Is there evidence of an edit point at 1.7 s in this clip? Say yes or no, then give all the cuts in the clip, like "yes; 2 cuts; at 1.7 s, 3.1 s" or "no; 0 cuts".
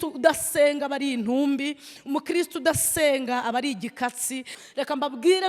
no; 1 cut; at 4.6 s